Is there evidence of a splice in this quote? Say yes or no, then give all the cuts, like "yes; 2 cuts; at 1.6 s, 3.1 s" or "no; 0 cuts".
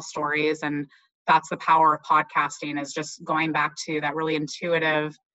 no; 0 cuts